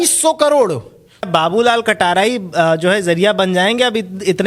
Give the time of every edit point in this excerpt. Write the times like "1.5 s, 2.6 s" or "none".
1.3 s